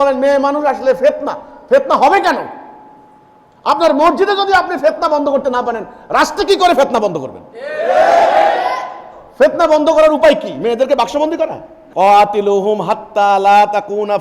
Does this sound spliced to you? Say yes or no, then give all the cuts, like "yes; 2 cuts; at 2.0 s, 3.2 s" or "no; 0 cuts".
no; 0 cuts